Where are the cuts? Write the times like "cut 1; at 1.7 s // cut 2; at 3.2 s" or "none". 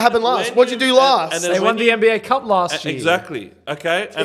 none

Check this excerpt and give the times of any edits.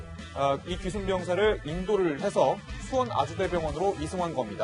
cut 1; at 3.1 s

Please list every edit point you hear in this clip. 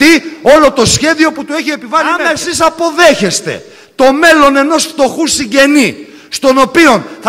cut 1; at 2.4 s

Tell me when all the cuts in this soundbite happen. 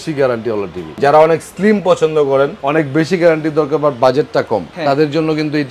cut 1; at 0.9 s // cut 2; at 4.7 s

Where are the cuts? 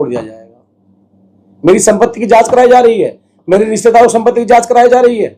none

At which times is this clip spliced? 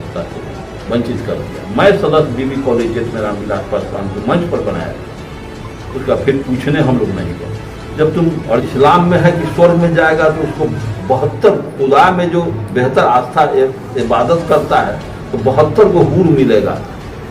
cut 1; at 8.6 s

